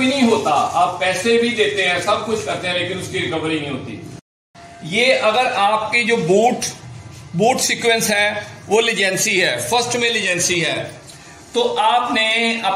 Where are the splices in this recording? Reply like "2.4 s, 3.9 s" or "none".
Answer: 4.4 s